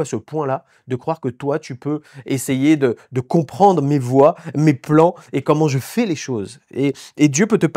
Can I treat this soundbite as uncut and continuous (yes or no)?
yes